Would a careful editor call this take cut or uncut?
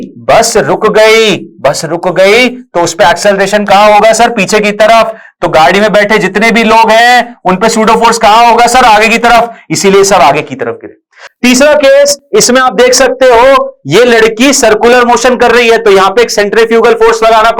uncut